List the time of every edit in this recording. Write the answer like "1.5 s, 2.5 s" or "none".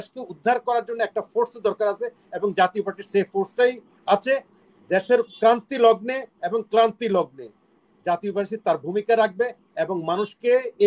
none